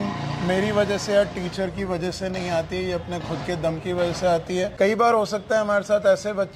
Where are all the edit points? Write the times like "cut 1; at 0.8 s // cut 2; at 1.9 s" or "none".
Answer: cut 1; at 4.7 s